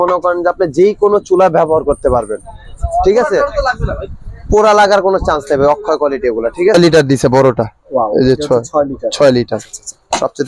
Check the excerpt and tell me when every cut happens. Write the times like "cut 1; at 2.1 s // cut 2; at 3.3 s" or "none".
cut 1; at 6.7 s